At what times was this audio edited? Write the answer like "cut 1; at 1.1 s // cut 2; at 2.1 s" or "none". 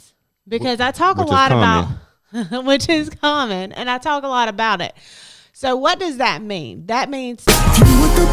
cut 1; at 7.4 s